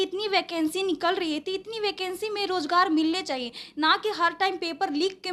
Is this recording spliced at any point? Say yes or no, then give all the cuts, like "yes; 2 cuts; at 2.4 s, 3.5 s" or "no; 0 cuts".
no; 0 cuts